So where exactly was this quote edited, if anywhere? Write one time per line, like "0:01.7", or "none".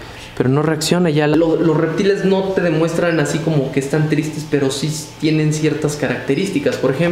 0:01.3